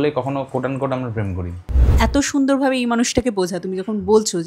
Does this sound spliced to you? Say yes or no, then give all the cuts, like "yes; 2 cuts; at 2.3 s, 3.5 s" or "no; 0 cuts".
yes; 1 cut; at 1.9 s